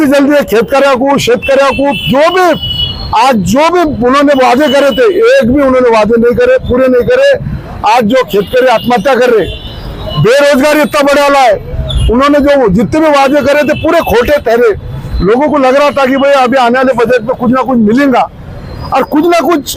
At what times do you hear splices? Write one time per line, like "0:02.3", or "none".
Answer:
none